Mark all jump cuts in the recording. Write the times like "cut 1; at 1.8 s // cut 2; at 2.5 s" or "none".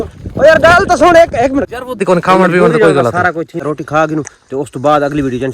cut 1; at 2.0 s